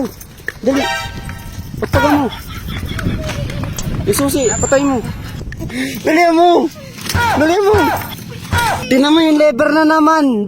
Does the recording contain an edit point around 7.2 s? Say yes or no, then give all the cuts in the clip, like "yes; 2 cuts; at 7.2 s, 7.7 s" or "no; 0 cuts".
no; 2 cuts; at 5.7 s, 8.8 s